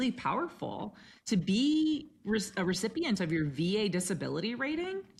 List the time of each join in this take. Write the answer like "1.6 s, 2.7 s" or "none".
none